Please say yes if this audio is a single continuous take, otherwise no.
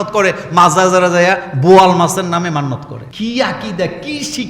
no